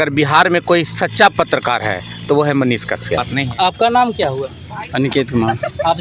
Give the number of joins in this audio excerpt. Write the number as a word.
one